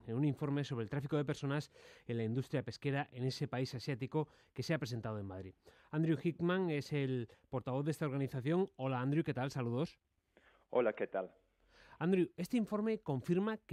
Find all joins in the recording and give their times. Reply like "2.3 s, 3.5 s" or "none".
none